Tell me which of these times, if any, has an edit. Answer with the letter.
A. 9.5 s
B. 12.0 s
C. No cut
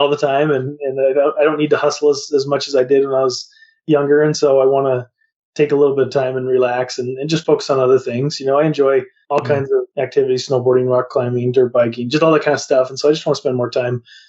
A